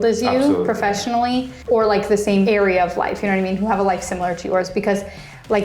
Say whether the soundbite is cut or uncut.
cut